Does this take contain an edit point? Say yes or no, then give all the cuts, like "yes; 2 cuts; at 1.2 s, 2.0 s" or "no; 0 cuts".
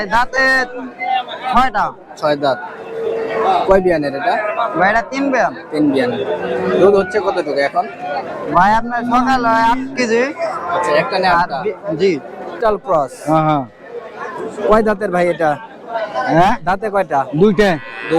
yes; 1 cut; at 12.6 s